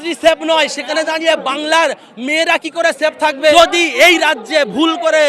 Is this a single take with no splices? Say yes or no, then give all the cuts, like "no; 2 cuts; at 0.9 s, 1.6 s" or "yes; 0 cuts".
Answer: no; 1 cut; at 3.5 s